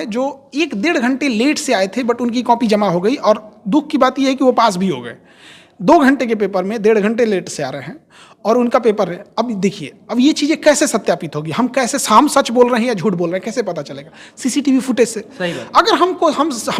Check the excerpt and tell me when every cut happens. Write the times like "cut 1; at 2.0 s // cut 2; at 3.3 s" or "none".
none